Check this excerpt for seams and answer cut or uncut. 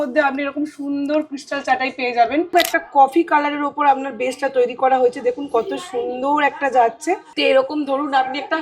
cut